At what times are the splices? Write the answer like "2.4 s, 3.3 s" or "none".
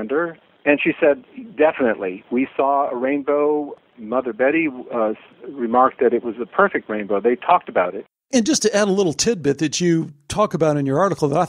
3.8 s, 5.3 s, 8.3 s